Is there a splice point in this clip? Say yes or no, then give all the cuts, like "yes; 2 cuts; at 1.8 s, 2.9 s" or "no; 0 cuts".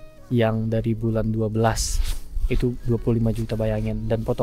no; 0 cuts